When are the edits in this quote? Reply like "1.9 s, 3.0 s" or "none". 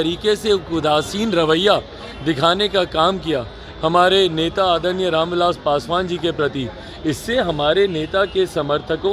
none